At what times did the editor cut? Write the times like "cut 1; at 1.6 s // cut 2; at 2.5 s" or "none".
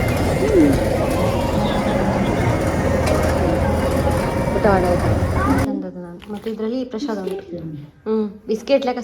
cut 1; at 5.5 s